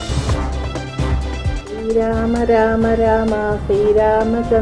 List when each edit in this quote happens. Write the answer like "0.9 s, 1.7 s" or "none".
1.5 s